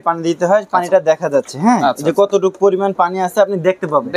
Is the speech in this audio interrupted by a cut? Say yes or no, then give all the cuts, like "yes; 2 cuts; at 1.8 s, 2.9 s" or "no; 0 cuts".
no; 0 cuts